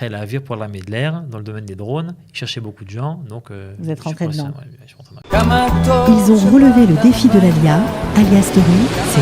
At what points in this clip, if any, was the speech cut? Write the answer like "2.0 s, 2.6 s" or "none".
5.1 s